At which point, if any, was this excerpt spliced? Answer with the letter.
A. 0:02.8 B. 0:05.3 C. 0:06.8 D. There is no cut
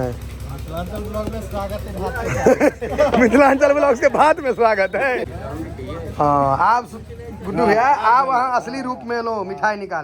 B